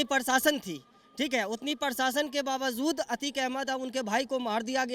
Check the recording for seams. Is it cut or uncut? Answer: uncut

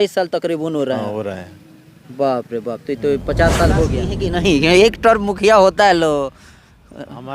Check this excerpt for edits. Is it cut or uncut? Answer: cut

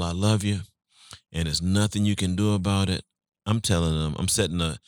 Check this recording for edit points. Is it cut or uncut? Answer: uncut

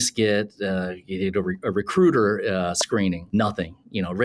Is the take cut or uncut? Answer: uncut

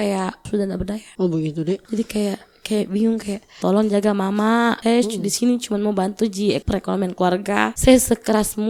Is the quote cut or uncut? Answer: cut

